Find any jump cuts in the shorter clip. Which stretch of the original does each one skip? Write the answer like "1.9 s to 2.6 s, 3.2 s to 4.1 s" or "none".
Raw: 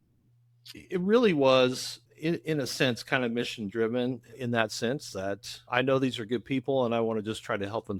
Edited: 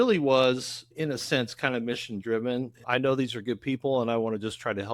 2.1 s to 2.4 s, 4.2 s to 5.6 s